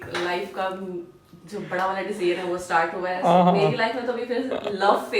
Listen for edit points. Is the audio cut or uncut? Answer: uncut